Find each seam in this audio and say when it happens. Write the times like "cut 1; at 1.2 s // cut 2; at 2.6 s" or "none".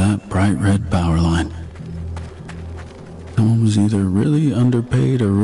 cut 1; at 1.6 s // cut 2; at 3.3 s

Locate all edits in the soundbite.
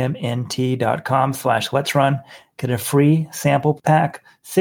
cut 1; at 3.6 s

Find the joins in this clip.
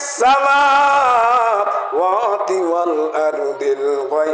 none

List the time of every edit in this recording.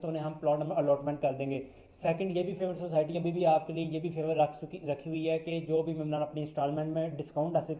none

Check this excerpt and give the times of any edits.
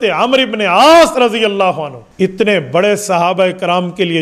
cut 1; at 2.3 s

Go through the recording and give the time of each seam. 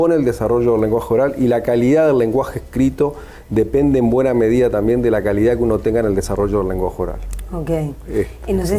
none

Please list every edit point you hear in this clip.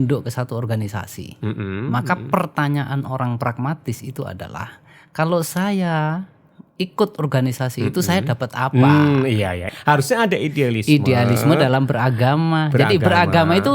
cut 1; at 9.6 s

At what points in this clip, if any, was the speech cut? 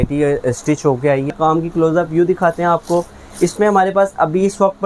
cut 1; at 1.3 s

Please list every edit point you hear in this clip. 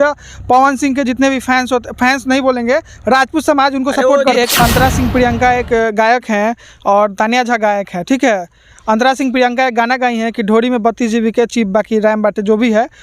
cut 1; at 4.3 s

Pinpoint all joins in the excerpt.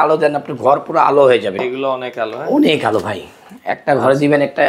cut 1; at 1.5 s

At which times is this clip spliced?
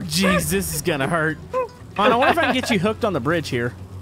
cut 1; at 1.8 s

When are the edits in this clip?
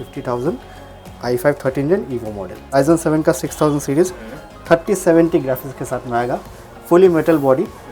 cut 1; at 2.7 s

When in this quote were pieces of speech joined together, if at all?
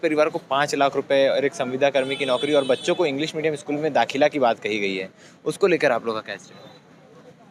none

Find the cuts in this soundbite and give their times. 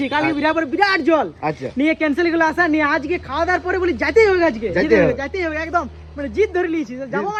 none

